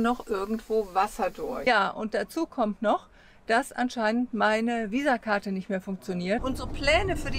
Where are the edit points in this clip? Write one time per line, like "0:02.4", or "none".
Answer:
0:01.6
0:06.4